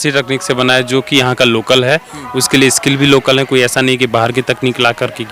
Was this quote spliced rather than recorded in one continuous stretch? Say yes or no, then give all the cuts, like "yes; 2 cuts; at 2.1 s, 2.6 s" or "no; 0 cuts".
no; 0 cuts